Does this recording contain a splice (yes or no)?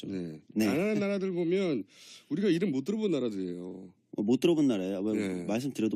no